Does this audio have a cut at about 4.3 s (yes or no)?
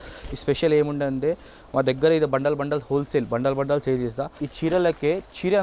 yes